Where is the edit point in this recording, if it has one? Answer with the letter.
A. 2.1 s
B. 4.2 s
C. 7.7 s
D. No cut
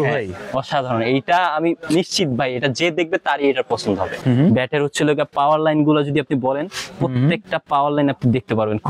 B